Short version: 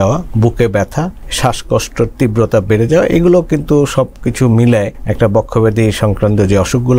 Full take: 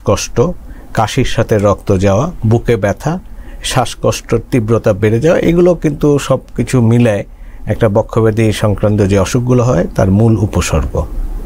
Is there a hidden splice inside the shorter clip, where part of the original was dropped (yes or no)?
yes